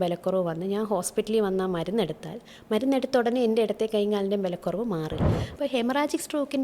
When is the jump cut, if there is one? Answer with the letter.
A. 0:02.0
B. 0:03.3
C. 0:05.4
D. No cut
C